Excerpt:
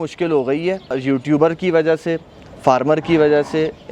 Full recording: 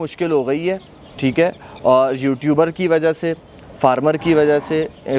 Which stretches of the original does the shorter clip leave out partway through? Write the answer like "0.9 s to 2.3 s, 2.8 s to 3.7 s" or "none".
1.0 s to 2.1 s